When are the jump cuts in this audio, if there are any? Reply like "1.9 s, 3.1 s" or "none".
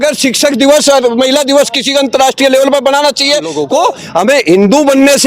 3.6 s